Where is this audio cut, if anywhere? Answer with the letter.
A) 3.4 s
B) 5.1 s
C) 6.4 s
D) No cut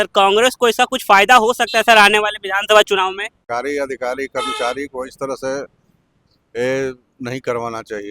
A